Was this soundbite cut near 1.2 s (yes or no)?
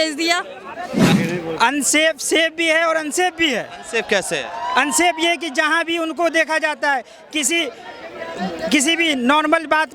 yes